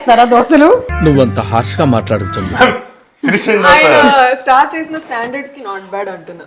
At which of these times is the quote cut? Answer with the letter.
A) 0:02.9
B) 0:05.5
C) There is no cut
C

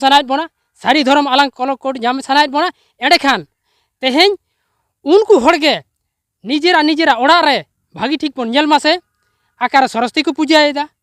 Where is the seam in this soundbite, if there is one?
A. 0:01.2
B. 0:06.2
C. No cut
C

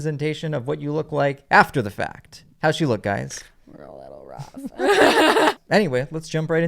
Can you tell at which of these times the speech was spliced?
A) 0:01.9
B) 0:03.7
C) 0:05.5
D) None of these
C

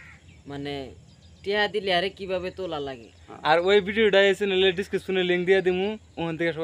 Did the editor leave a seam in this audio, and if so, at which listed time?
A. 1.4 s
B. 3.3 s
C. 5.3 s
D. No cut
D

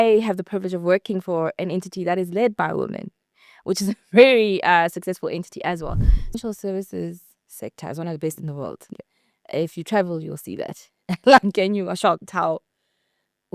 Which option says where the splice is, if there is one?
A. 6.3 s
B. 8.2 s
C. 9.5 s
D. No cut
A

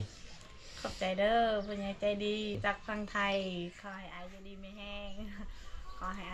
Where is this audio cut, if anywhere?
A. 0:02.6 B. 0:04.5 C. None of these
A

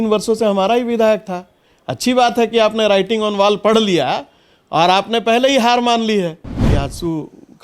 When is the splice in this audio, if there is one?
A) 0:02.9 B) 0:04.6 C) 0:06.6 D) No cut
C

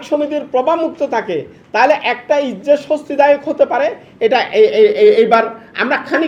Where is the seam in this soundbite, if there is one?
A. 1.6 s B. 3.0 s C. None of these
C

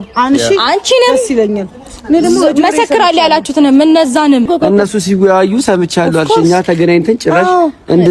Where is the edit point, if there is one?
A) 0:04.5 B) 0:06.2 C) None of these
A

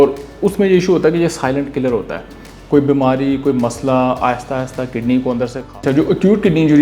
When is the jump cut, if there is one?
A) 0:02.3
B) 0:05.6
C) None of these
B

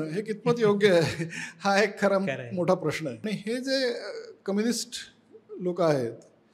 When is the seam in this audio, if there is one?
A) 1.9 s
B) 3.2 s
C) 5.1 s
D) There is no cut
B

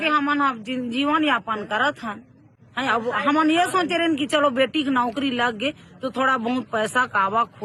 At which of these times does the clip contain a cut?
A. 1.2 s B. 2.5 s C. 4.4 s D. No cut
D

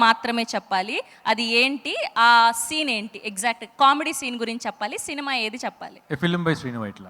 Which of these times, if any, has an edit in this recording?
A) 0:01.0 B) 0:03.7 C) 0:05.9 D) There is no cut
C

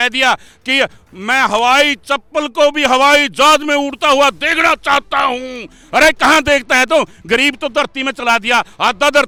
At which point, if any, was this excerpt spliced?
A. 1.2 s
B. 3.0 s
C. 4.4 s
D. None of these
D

